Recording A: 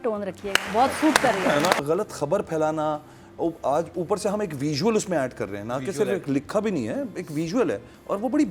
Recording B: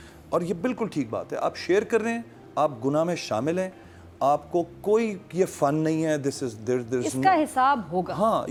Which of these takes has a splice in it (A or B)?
A